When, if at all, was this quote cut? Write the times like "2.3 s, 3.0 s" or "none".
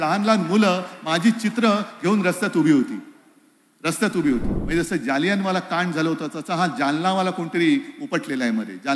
4.6 s

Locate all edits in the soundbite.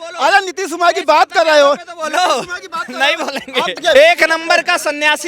3.8 s

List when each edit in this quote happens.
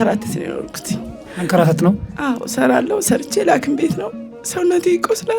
none

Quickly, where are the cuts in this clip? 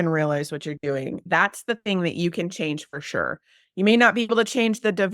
1.2 s, 3.6 s

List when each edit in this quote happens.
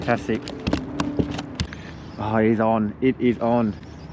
1.6 s

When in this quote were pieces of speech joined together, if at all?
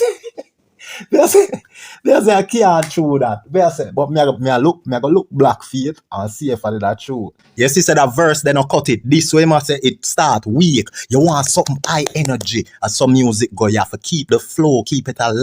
7.4 s

